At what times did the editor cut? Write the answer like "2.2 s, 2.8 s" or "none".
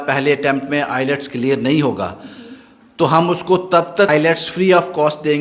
4.1 s